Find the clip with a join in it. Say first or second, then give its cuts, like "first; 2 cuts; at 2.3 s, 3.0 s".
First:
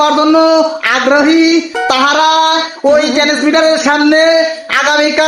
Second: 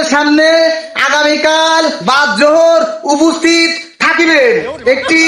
first; 1 cut; at 2.7 s